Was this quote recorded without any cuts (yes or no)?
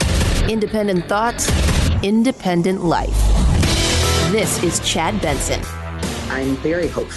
no